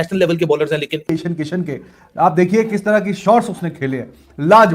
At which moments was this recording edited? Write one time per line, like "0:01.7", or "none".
0:01.0